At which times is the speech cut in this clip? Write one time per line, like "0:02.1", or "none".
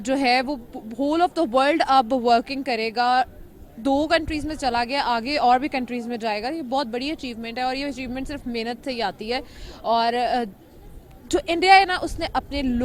none